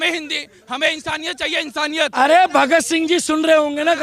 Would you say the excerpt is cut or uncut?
cut